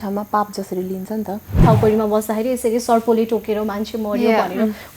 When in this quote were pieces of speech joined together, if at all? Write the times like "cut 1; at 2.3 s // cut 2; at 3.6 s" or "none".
cut 1; at 1.6 s